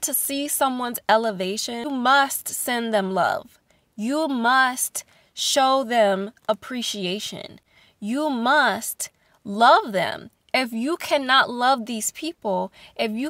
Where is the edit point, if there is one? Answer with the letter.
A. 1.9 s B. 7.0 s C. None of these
A